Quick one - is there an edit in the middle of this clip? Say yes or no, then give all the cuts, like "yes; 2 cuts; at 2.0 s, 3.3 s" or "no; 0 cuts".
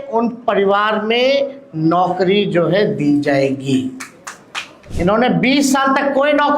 yes; 1 cut; at 4.8 s